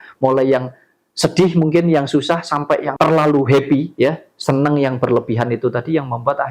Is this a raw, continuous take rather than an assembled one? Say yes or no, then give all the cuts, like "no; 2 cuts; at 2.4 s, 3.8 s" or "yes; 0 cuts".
no; 1 cut; at 2.9 s